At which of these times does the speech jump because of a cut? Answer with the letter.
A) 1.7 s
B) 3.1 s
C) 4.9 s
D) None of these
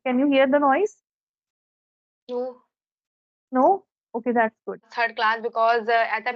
C